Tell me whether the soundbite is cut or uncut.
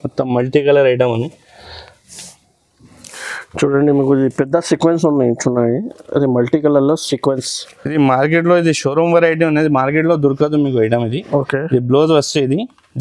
uncut